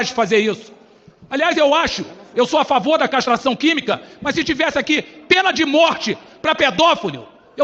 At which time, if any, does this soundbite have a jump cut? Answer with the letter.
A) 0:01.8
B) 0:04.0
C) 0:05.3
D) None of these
D